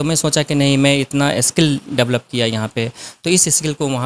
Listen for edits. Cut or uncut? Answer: uncut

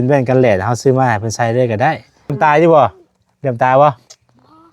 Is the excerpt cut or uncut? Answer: cut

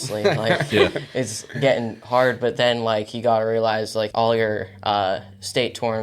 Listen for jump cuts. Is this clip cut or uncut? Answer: cut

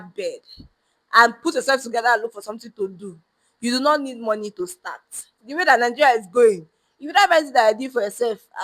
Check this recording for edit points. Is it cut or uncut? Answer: cut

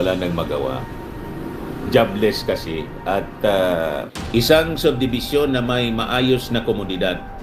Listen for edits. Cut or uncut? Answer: cut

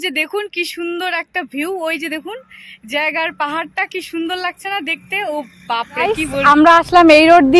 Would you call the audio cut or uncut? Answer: cut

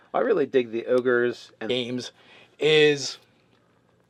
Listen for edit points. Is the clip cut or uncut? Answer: uncut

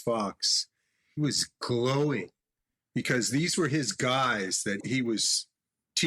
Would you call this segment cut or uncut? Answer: cut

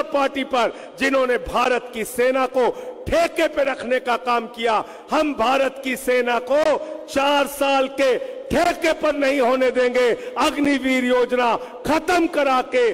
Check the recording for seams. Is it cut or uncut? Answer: uncut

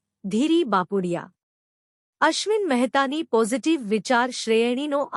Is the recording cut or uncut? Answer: uncut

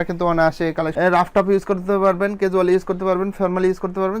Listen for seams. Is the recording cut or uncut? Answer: cut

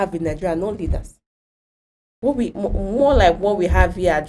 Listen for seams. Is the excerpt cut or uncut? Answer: uncut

